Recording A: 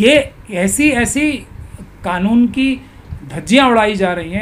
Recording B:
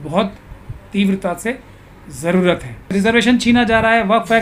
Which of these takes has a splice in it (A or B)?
B